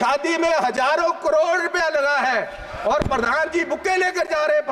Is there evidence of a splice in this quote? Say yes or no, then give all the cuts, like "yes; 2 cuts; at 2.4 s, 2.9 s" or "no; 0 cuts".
no; 0 cuts